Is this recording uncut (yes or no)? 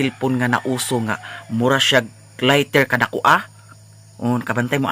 yes